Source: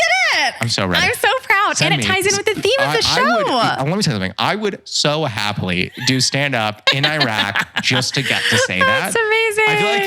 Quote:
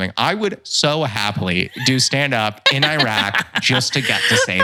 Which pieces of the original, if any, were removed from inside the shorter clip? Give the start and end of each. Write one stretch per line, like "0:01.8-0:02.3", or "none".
none